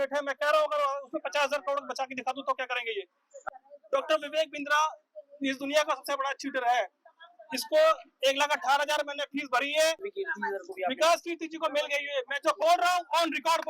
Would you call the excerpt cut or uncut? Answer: cut